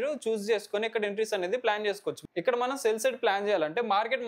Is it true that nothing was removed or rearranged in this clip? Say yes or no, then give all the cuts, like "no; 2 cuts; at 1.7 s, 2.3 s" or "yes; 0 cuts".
no; 1 cut; at 2.2 s